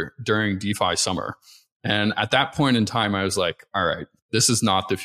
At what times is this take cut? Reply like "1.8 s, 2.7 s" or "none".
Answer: 4.1 s